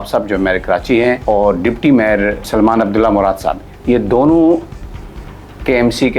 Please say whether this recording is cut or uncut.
cut